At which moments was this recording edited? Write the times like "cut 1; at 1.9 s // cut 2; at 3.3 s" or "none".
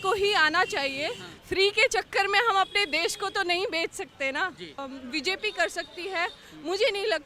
cut 1; at 1.3 s // cut 2; at 4.9 s